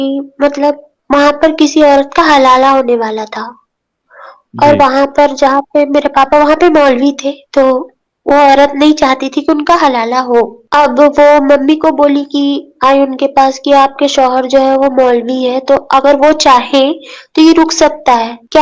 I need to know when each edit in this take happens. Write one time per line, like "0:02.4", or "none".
0:00.9